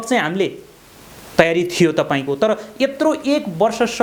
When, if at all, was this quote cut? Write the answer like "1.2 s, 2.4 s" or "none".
none

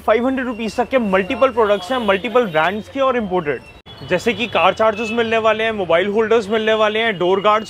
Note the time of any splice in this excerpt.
3.9 s

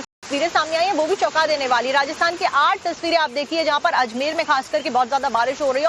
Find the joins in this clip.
none

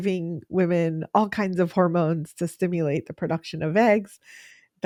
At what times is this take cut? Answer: none

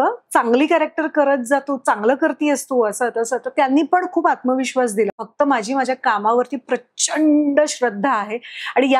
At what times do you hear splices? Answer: 5.2 s

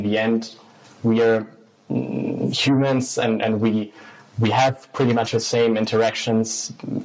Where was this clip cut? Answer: none

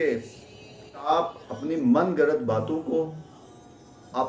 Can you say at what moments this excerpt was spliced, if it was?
1.1 s

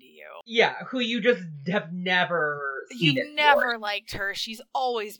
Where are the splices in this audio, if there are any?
none

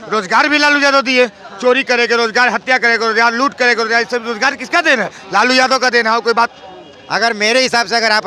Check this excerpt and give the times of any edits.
6.5 s

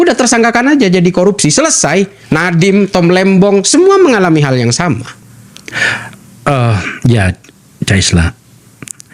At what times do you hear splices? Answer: none

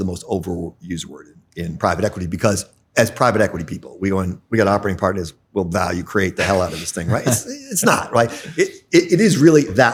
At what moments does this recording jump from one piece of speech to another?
none

